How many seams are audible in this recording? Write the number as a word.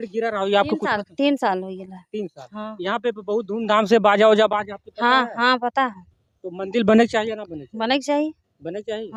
zero